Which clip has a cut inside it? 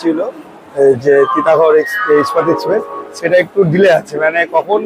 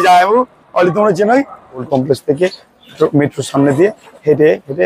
second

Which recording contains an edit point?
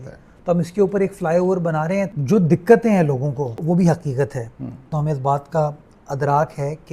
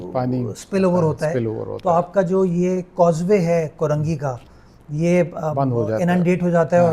first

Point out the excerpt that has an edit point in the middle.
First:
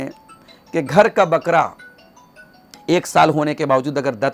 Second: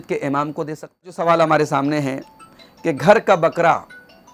second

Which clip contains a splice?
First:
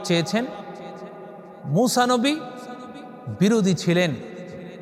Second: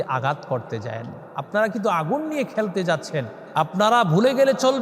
second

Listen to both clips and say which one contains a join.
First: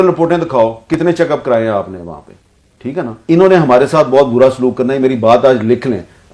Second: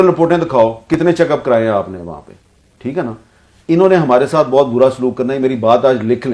first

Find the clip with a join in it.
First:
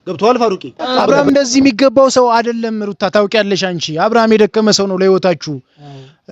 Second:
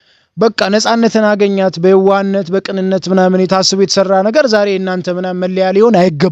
first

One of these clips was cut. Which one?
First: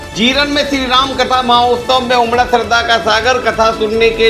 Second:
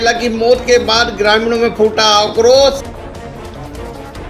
second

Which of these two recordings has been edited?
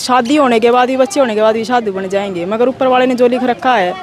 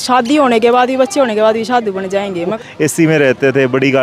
second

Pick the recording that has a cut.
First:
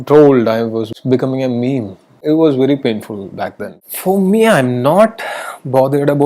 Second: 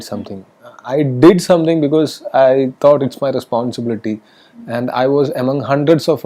first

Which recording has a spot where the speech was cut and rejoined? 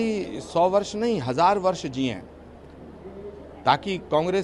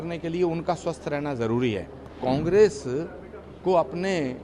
second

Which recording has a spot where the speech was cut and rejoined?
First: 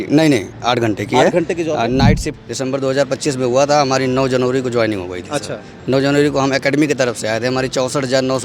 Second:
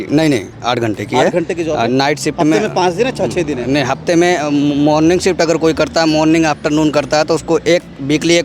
first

